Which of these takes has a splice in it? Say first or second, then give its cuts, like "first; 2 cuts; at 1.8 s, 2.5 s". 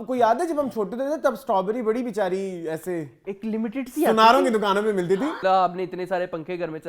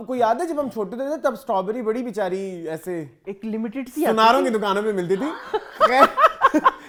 first; 1 cut; at 5.4 s